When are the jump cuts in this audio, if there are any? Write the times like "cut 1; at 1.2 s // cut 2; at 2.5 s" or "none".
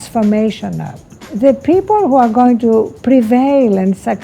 cut 1; at 1.3 s // cut 2; at 2.9 s